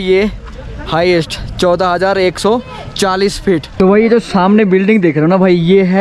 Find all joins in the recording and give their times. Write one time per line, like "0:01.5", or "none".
0:03.7